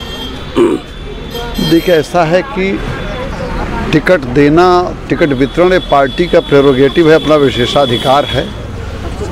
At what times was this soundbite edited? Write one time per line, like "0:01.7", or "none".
none